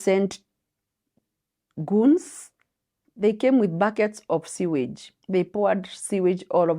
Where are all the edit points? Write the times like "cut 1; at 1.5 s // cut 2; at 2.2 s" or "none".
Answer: cut 1; at 3.0 s